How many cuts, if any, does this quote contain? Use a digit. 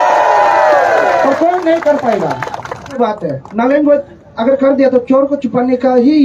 1